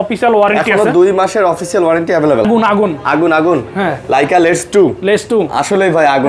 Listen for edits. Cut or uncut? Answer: cut